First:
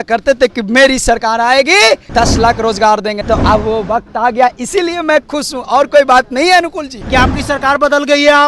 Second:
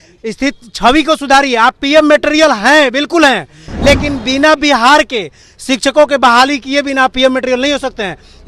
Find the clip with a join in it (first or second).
first